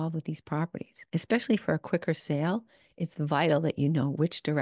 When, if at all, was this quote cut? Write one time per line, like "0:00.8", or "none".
0:01.0